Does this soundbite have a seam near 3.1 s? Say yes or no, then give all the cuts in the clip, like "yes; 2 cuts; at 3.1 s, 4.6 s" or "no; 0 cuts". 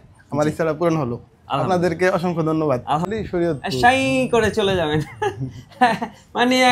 yes; 1 cut; at 3.1 s